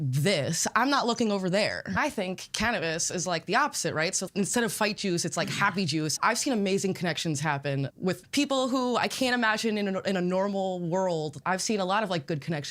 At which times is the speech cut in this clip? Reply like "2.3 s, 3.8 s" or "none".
2.0 s, 4.2 s, 6.1 s, 7.9 s, 11.4 s